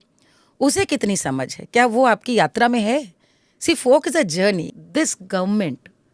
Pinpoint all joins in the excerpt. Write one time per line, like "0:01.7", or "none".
0:04.6